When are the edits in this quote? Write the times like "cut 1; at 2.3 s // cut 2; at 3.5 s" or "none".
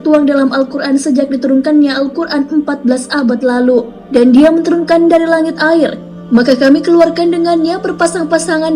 none